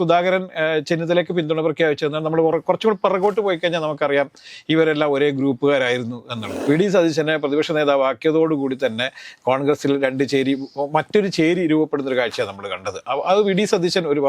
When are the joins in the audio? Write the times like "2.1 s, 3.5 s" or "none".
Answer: 6.5 s

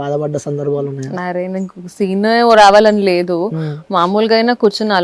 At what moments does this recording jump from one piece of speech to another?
none

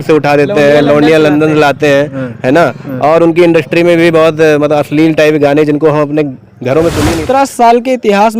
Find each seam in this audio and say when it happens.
7.1 s

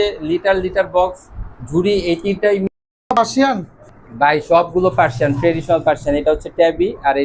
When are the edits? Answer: 2.7 s

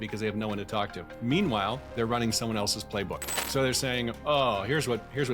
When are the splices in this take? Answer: 1.1 s, 1.8 s

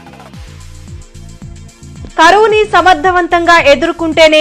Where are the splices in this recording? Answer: 1.7 s

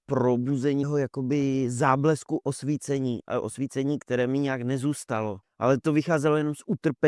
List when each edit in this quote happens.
0.9 s, 5.4 s

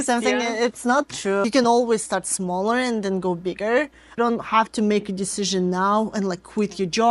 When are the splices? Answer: 1.4 s, 4.2 s

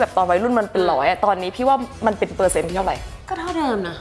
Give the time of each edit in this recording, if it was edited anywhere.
none

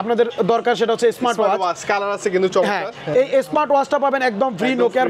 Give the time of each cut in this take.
none

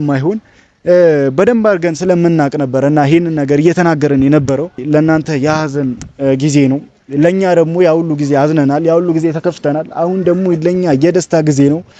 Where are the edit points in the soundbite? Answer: 4.8 s

